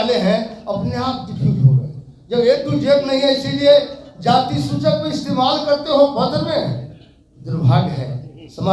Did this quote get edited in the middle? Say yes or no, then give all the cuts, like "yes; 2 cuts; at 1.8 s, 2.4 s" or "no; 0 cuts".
no; 0 cuts